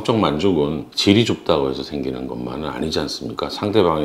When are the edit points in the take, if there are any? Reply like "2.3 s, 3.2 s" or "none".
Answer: 0.9 s